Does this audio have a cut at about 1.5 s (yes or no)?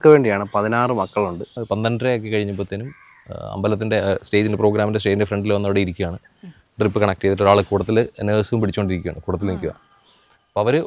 yes